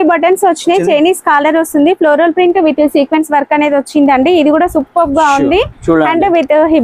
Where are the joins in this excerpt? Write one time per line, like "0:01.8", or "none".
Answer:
none